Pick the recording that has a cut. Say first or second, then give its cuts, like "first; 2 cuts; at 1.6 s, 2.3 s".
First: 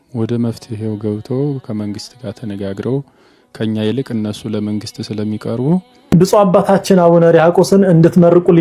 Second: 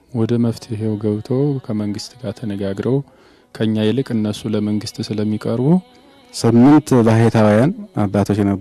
first; 1 cut; at 5.9 s